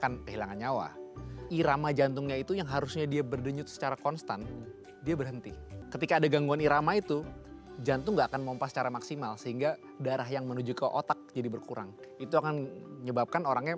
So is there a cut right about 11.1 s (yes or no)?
no